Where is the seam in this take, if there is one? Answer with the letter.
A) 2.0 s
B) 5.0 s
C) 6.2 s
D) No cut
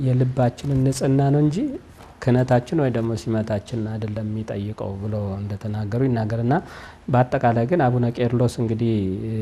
D